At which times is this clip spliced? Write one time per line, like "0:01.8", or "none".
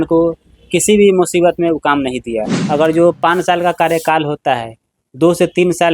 0:02.5